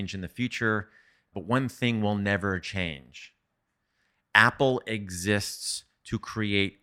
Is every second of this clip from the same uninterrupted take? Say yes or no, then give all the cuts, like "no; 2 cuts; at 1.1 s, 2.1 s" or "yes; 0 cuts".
yes; 0 cuts